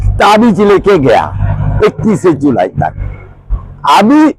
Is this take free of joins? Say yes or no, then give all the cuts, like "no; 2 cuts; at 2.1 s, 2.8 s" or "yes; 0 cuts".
yes; 0 cuts